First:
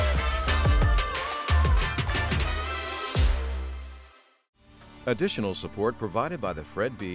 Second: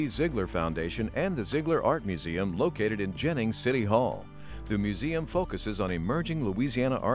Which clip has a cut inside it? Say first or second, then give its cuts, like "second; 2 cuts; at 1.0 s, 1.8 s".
first; 1 cut; at 4.9 s